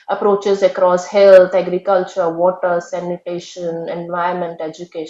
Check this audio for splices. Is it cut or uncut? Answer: uncut